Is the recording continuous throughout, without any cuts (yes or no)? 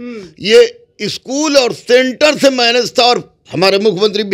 no